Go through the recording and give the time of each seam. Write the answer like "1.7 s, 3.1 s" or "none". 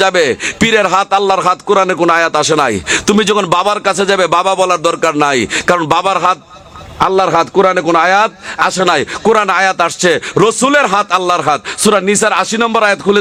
none